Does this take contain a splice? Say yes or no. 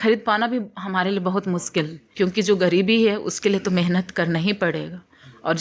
yes